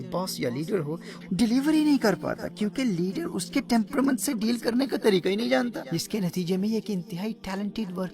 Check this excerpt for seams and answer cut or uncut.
cut